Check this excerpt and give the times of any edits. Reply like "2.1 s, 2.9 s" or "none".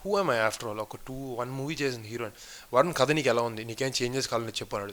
none

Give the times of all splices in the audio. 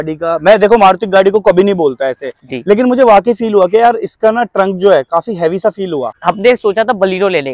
6.1 s

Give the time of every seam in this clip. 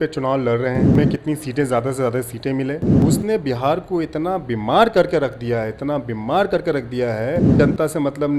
0.9 s, 2.9 s, 7.5 s

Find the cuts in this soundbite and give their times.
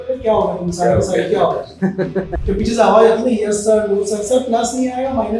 2.4 s

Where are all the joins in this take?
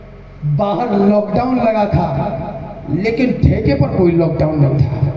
none

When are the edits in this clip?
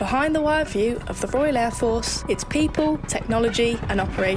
none

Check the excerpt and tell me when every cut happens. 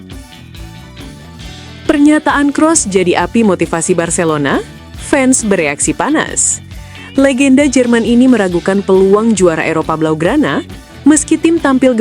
1.9 s

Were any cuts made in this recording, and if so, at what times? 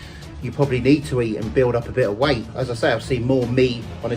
1.5 s, 2.6 s

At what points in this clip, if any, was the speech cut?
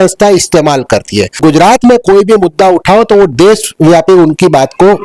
1.4 s

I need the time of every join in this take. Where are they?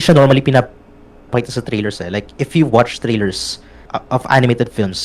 3.9 s

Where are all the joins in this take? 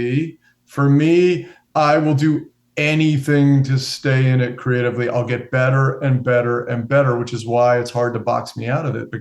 1.6 s

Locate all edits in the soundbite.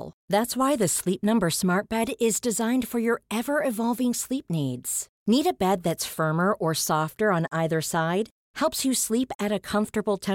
none

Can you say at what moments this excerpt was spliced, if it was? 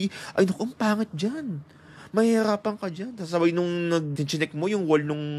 4.2 s

